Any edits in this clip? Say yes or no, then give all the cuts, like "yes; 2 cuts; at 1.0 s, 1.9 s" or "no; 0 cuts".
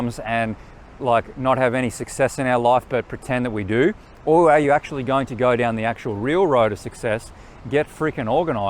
no; 0 cuts